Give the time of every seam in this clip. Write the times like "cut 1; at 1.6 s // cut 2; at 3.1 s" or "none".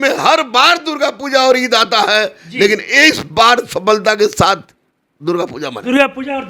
none